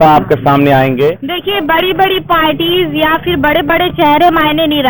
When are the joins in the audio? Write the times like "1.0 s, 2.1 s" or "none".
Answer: 1.3 s